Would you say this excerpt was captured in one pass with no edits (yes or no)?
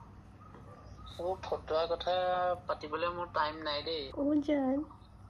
no